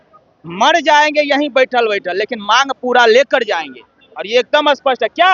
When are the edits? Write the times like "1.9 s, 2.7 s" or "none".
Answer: none